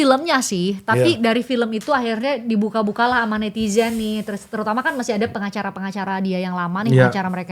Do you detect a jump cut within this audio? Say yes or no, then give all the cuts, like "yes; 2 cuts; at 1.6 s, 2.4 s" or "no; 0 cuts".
no; 0 cuts